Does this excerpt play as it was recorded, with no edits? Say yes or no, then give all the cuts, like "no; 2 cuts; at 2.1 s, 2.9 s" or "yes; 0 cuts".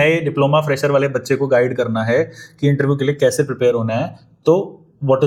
yes; 0 cuts